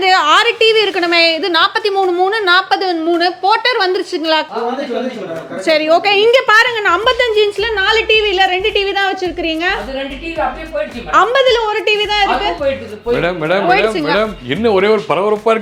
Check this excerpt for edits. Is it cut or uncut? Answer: uncut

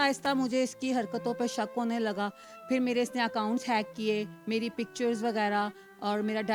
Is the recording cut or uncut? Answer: uncut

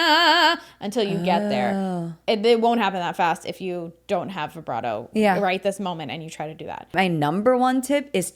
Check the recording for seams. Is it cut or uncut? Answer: cut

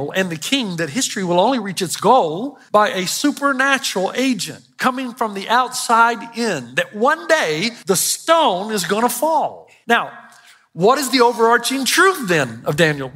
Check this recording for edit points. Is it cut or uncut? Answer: cut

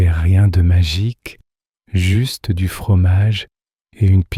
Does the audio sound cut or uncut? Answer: uncut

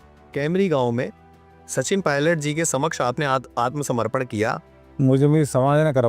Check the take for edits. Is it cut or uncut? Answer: cut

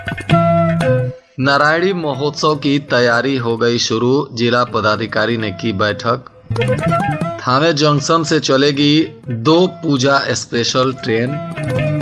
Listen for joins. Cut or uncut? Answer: cut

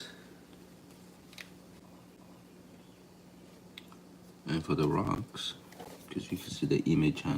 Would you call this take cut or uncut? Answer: cut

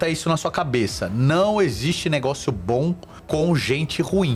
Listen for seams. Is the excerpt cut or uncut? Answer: uncut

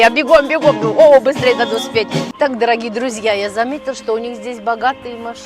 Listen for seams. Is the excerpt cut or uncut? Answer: cut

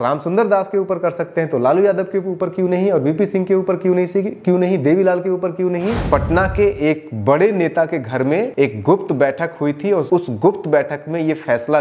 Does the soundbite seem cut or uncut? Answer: cut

